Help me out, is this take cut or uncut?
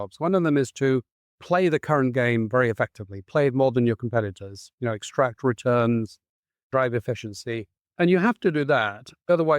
cut